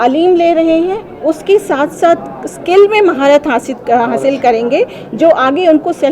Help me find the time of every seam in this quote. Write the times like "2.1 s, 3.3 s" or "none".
none

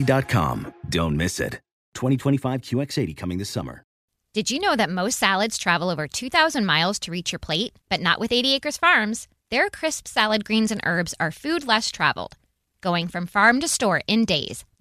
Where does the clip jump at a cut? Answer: 4.0 s

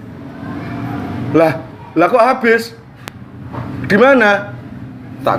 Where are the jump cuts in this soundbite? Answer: none

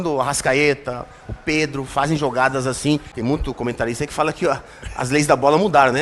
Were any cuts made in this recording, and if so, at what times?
3.1 s

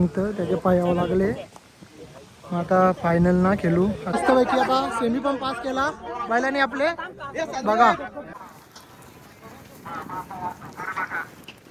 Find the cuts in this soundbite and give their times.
4.1 s, 8.3 s

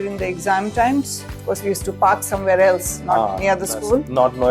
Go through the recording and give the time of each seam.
1.4 s

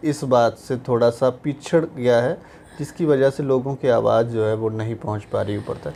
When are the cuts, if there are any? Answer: none

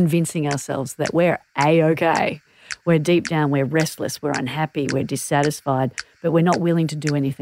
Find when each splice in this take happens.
none

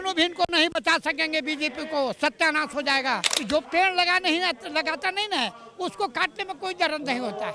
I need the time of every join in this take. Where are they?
3.3 s

